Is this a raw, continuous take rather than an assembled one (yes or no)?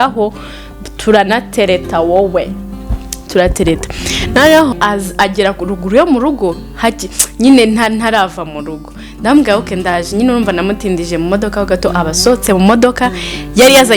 no